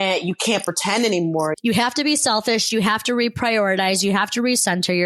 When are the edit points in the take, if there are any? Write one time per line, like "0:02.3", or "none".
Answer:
0:01.6